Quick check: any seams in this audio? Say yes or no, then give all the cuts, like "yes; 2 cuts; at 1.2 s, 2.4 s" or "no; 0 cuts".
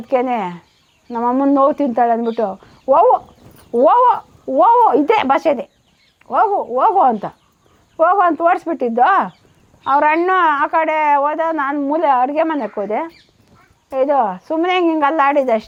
no; 0 cuts